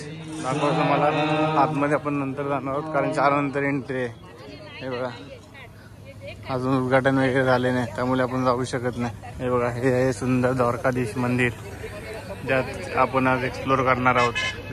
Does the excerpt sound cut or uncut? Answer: uncut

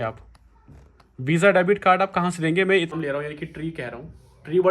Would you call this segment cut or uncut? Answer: cut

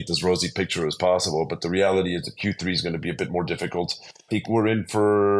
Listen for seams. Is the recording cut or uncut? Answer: cut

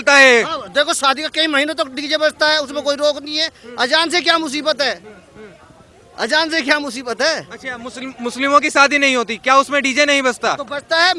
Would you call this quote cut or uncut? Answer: uncut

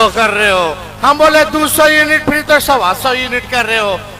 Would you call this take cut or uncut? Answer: uncut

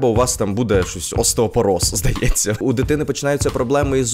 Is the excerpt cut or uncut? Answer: cut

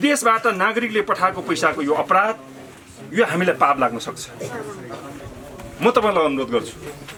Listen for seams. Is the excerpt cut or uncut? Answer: uncut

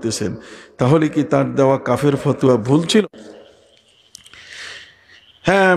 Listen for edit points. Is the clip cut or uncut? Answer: cut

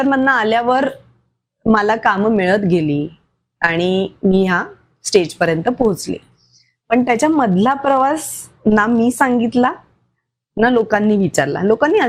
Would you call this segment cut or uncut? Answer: uncut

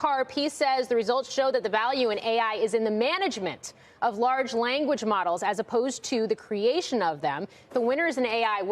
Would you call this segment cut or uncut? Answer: cut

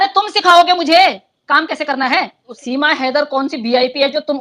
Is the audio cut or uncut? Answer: cut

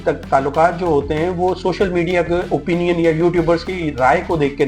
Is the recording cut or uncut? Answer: uncut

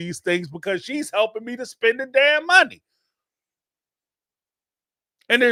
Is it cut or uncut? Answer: uncut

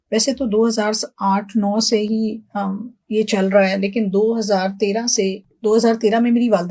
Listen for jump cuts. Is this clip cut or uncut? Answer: uncut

